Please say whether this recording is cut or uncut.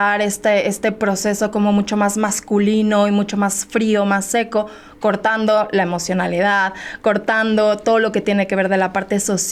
uncut